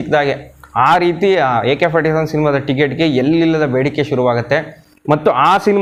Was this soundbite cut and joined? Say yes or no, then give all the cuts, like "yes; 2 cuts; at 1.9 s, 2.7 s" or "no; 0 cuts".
no; 0 cuts